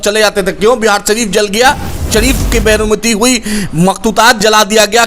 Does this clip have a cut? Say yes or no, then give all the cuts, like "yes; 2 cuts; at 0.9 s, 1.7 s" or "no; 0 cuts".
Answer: yes; 1 cut; at 2.1 s